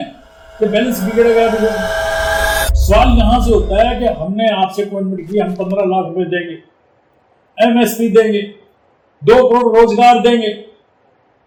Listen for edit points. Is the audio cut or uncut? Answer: uncut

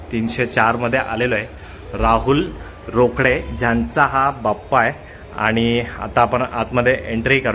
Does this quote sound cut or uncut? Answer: uncut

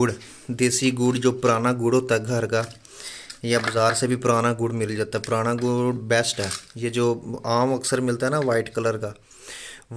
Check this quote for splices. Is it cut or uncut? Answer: uncut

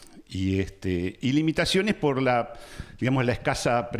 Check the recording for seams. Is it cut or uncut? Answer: cut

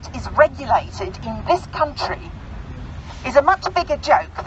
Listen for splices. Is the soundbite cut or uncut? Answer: uncut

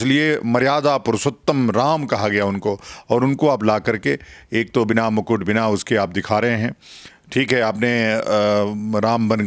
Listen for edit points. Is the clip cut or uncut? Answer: uncut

